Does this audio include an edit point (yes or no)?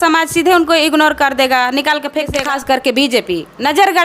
yes